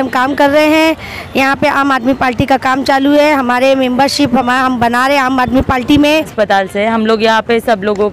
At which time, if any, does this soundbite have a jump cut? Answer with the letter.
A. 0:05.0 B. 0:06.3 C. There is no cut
B